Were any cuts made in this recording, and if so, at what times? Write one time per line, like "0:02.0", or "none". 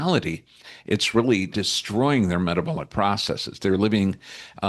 0:01.6